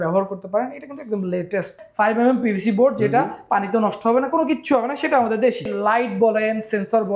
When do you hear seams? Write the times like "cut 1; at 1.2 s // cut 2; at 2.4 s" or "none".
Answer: cut 1; at 1.8 s // cut 2; at 5.7 s